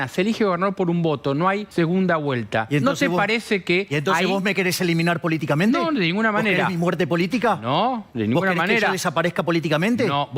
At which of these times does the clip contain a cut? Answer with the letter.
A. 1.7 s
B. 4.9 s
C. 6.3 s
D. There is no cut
A